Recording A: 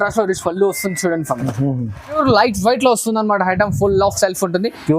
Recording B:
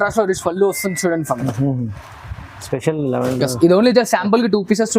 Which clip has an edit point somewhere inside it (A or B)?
A